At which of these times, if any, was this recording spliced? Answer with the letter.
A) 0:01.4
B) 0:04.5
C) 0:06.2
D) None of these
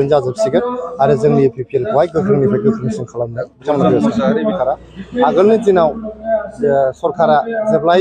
B